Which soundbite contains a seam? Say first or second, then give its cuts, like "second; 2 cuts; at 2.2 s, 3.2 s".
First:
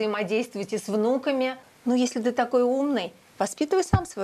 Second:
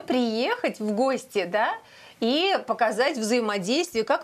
first; 1 cut; at 1.7 s